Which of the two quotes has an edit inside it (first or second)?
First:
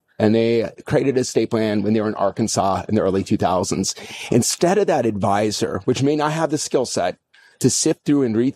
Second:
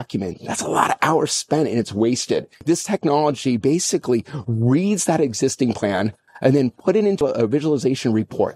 second